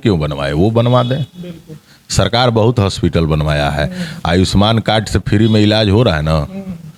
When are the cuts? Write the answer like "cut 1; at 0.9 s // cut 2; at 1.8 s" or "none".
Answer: none